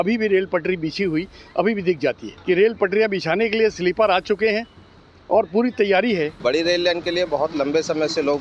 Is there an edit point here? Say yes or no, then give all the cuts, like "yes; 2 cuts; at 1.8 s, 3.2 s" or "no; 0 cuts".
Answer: yes; 2 cuts; at 2.3 s, 6.4 s